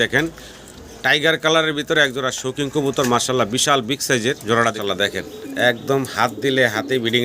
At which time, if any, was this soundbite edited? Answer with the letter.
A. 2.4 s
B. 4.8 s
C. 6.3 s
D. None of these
B